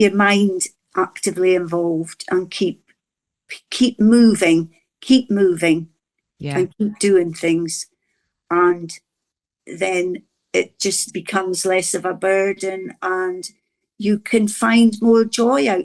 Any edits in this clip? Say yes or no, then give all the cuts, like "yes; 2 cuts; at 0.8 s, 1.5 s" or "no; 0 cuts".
no; 0 cuts